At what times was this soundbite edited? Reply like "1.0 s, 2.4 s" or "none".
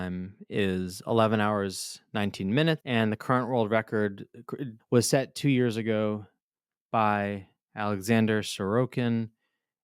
2.8 s

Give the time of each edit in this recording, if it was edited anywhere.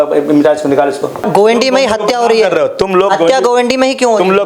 1.2 s

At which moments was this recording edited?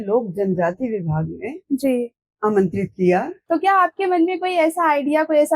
3.4 s

